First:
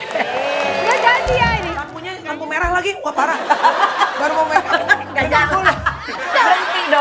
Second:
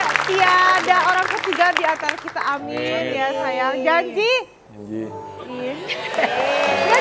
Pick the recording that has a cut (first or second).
first